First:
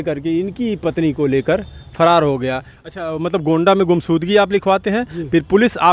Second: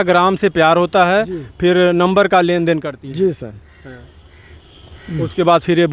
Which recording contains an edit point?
first; 1 cut; at 2.7 s

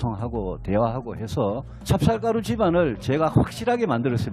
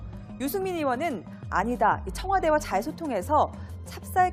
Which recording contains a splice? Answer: first; 1 cut; at 2.5 s

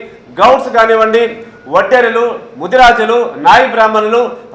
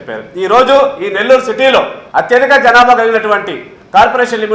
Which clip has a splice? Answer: second; 1 cut; at 2.0 s

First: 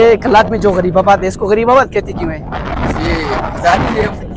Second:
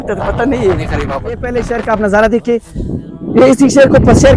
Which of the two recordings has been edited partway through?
second; 1 cut; at 1.4 s

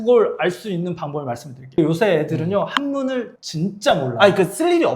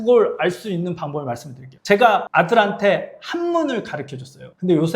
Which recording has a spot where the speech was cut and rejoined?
first; 1 cut; at 1.8 s

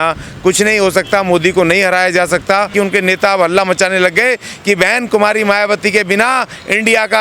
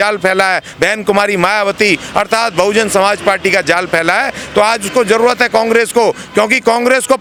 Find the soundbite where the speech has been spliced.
first; 1 cut; at 2.7 s

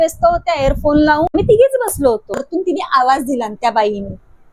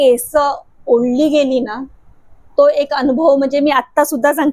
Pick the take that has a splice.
first; 2 cuts; at 1.3 s, 2.4 s

